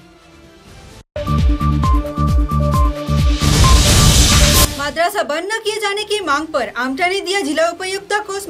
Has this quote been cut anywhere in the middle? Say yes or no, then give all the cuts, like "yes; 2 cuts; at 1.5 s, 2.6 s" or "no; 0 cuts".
yes; 2 cuts; at 1.1 s, 4.7 s